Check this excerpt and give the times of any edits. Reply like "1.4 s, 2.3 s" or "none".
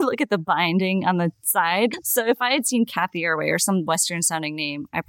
1.9 s